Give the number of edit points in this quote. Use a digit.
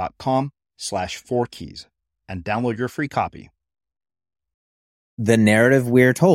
1